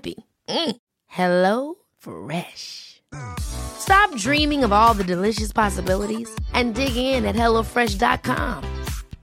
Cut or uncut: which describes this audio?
uncut